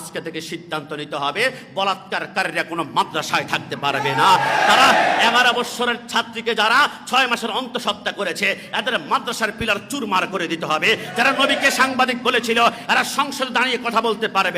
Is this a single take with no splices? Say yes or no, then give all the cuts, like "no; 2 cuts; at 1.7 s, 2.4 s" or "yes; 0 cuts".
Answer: yes; 0 cuts